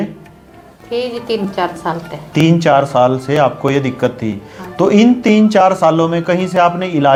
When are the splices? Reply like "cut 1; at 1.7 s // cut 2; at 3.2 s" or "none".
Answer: none